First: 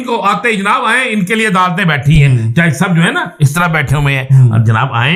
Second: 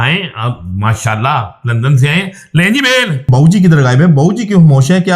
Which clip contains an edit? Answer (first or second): second